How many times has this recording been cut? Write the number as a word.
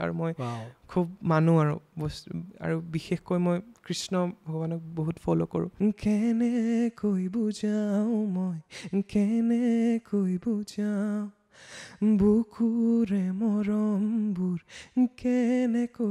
one